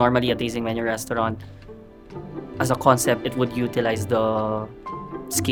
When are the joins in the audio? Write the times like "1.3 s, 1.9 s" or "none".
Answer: none